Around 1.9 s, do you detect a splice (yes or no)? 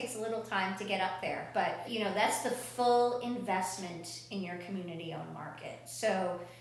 yes